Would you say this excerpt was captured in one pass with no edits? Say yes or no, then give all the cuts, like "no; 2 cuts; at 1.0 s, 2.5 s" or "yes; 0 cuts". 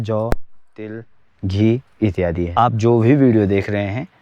no; 1 cut; at 2.5 s